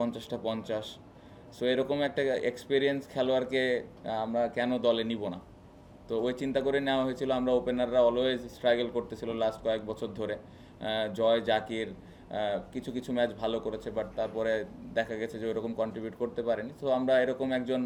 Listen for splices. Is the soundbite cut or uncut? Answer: uncut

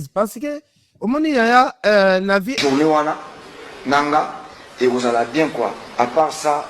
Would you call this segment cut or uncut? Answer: cut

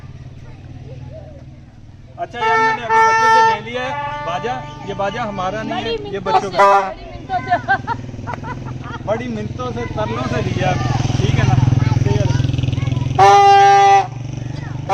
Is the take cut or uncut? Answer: cut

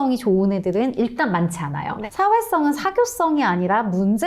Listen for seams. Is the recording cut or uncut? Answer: cut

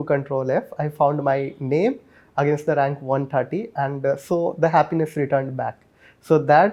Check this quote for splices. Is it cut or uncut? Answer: uncut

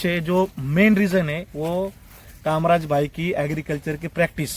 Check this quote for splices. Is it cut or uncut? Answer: uncut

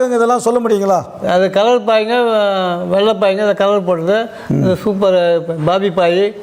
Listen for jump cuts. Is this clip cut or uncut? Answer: uncut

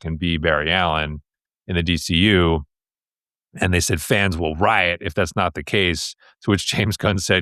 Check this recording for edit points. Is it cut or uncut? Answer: uncut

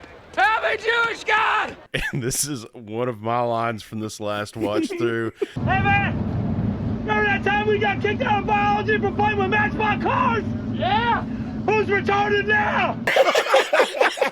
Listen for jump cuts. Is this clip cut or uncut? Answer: cut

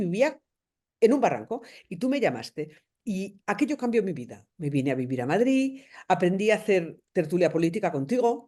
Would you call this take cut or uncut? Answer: uncut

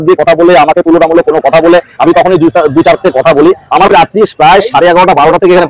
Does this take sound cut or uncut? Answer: cut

